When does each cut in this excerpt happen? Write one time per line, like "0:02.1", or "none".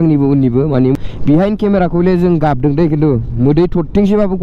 0:00.9